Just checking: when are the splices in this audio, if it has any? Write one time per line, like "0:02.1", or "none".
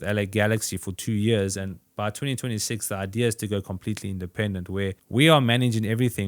0:05.0